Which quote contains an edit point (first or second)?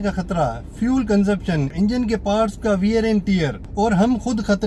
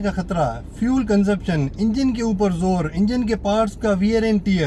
first